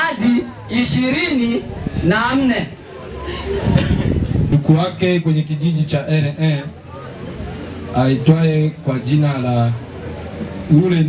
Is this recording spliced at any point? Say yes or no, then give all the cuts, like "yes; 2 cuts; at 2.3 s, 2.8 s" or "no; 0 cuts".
yes; 1 cut; at 4.5 s